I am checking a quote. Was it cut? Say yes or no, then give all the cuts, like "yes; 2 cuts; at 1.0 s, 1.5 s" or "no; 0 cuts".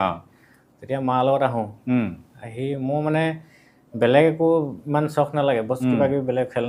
no; 0 cuts